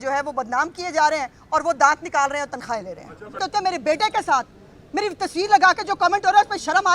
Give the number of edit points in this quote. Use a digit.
1